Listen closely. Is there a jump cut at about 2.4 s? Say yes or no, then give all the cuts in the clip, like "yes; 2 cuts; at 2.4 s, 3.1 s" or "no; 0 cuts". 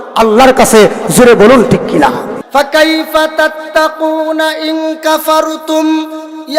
yes; 1 cut; at 2.4 s